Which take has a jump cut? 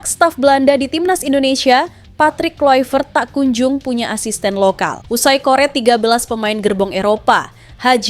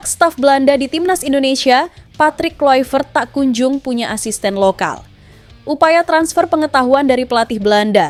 first; 1 cut; at 5.0 s

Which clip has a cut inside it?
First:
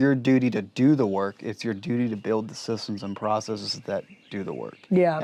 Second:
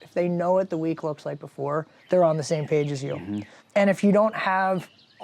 second; 2 cuts; at 1.9 s, 3.5 s

